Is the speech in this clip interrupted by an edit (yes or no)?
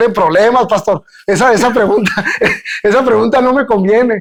no